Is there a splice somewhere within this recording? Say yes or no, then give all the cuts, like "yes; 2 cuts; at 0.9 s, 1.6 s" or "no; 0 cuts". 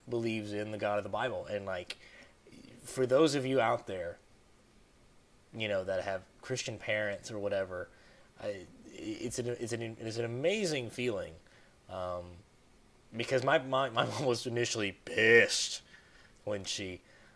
yes; 1 cut; at 12.4 s